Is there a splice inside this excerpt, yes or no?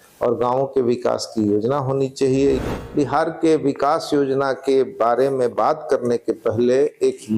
yes